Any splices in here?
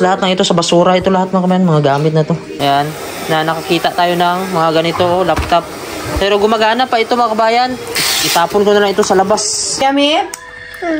yes; 3 cuts; at 2.5 s, 8.0 s, 9.7 s

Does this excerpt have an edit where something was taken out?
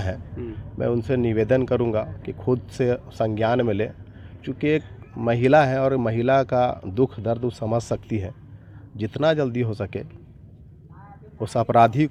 no; 0 cuts

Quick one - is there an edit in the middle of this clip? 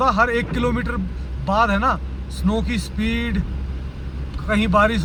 no; 0 cuts

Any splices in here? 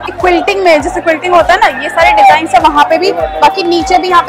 no; 0 cuts

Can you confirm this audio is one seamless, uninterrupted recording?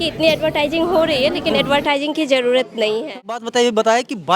no; 1 cut; at 3.5 s

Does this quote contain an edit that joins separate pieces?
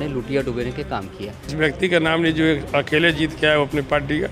yes; 1 cut; at 1.5 s

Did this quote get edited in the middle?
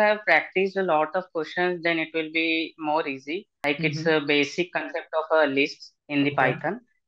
yes; 1 cut; at 3.5 s

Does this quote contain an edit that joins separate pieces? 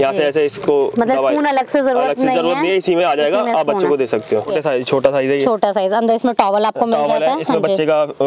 yes; 1 cut; at 4.5 s

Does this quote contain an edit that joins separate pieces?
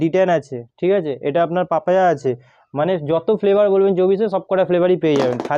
no; 0 cuts

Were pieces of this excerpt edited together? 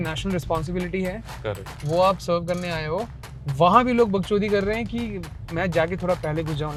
no; 0 cuts

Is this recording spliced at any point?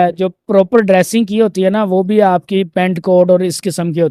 no; 0 cuts

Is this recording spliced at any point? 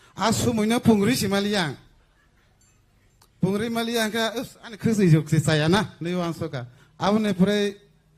yes; 1 cut; at 4.1 s

